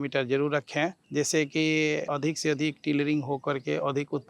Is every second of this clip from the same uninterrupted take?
no; 2 cuts; at 1.0 s, 2.1 s

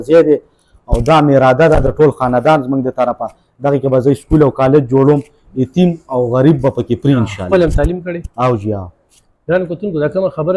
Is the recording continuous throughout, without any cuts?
yes; 0 cuts

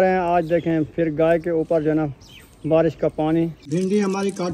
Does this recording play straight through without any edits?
no; 1 cut; at 3.6 s

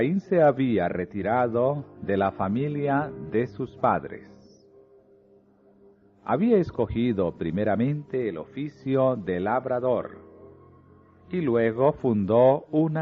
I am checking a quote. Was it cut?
yes; 1 cut; at 6.9 s

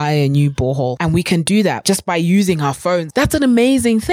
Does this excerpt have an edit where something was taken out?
yes; 3 cuts; at 1.0 s, 1.8 s, 3.1 s

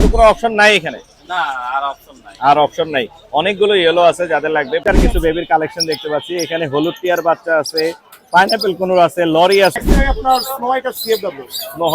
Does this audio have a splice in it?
yes; 2 cuts; at 4.8 s, 9.8 s

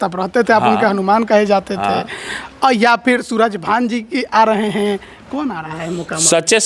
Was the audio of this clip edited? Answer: no; 0 cuts

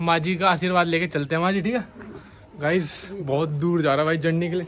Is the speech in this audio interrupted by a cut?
no; 0 cuts

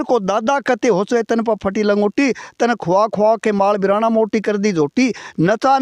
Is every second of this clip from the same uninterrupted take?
yes; 0 cuts

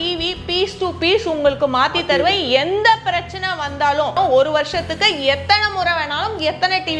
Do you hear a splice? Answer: yes; 1 cut; at 4.2 s

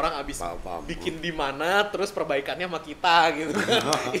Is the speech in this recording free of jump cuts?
yes; 0 cuts

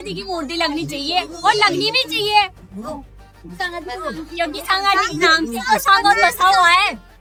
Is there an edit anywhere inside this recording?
no; 0 cuts

